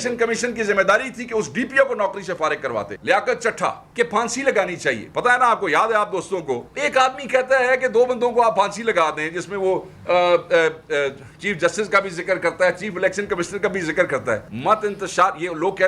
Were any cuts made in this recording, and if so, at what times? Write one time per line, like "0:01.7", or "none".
0:02.9
0:03.8
0:06.7
0:14.5